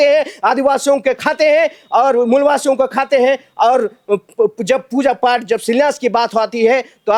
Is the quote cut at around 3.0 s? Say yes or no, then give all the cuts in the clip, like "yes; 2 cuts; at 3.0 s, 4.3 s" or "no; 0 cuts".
no; 0 cuts